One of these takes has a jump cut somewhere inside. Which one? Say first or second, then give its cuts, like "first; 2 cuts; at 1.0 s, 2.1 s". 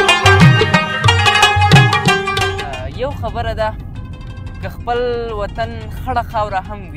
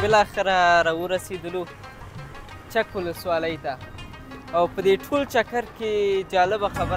first; 1 cut; at 2.4 s